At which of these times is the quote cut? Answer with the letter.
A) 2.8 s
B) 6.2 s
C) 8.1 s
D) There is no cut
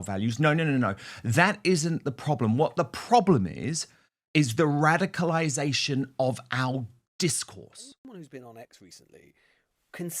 C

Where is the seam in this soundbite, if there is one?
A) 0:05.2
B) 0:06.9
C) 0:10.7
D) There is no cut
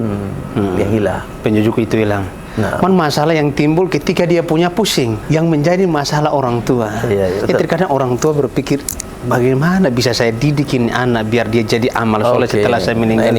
A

